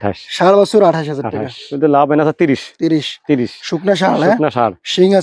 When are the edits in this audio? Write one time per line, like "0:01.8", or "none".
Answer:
0:01.6